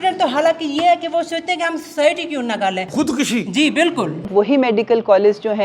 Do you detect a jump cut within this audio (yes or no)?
yes